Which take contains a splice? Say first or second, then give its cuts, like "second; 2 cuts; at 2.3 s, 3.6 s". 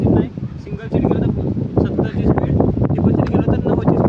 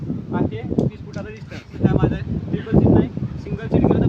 second; 1 cut; at 1.7 s